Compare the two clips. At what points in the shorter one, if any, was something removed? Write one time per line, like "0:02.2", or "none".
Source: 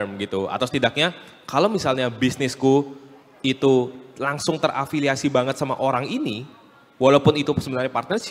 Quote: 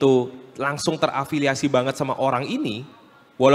none